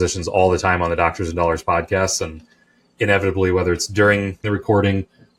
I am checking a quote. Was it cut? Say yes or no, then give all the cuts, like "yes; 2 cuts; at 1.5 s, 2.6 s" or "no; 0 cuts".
yes; 1 cut; at 4.4 s